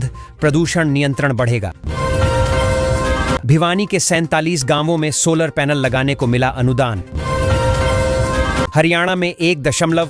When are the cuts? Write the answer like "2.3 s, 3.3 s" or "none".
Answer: 1.8 s, 3.4 s, 7.2 s, 8.7 s